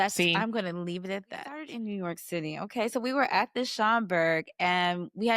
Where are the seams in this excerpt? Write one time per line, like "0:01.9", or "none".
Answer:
0:01.7